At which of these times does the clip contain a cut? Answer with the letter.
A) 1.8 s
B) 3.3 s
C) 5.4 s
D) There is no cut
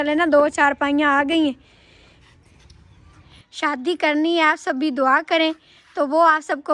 B